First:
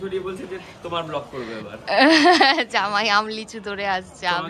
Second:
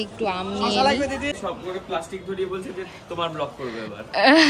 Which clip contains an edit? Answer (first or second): second